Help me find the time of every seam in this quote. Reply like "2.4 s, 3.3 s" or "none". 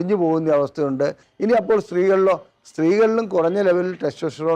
1.3 s

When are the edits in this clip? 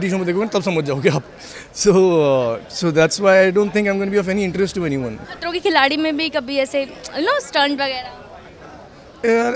5.2 s

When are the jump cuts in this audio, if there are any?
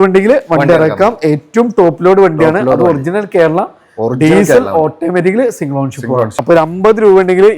6.4 s

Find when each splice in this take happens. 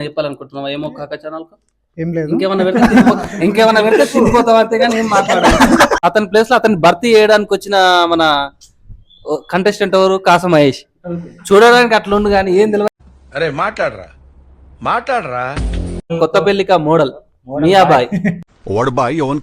6.0 s, 16.1 s

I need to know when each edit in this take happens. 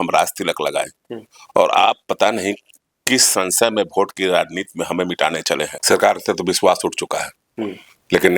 5.7 s

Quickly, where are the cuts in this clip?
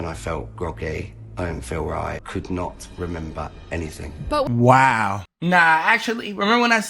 2.2 s, 5.3 s

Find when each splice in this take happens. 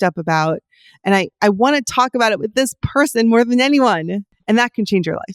4.3 s

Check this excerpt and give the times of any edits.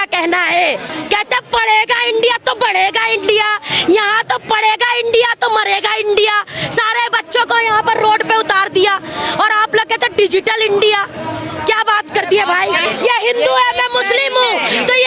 0.9 s, 12.8 s

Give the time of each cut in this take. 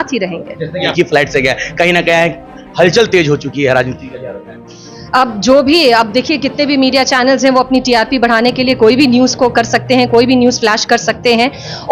0.9 s

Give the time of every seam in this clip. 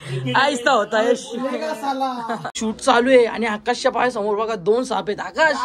2.5 s

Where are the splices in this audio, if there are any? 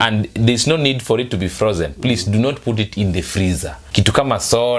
3.8 s

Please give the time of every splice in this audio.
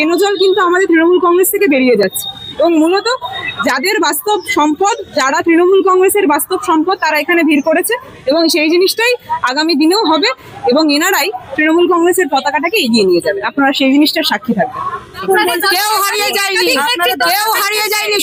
none

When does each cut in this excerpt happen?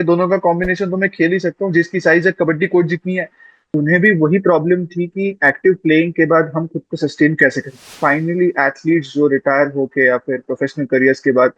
3.6 s, 8.0 s

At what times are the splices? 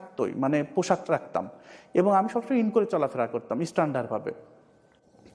none

